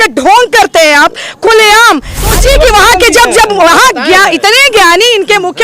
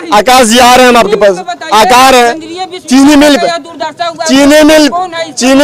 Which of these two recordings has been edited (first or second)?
first